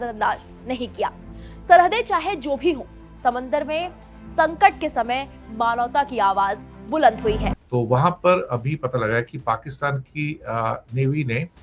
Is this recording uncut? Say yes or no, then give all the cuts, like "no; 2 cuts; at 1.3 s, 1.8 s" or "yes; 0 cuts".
no; 1 cut; at 7.6 s